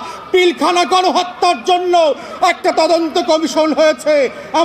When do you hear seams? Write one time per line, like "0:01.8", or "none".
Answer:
0:02.3